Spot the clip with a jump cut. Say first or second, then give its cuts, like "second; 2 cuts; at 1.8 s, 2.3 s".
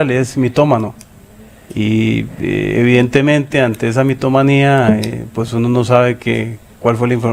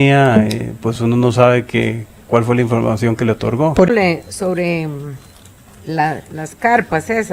second; 1 cut; at 3.9 s